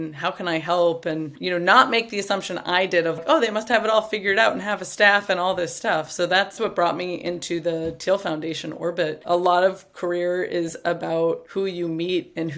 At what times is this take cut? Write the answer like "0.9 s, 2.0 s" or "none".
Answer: 3.2 s, 9.2 s, 11.4 s